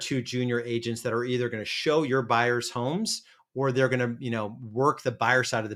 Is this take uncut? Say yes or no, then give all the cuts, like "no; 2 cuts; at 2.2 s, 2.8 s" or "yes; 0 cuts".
yes; 0 cuts